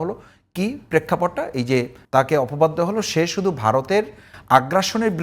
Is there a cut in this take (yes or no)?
yes